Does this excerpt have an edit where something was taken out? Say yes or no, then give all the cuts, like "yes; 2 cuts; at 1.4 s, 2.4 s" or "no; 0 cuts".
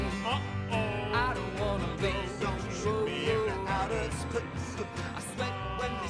no; 0 cuts